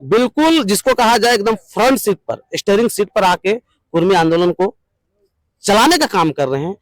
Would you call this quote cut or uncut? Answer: uncut